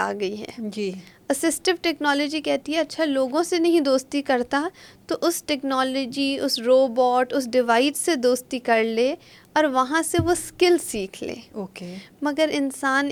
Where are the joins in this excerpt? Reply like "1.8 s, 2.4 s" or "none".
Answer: none